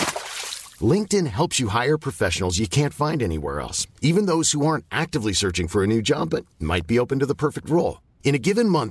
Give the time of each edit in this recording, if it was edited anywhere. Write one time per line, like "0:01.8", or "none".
none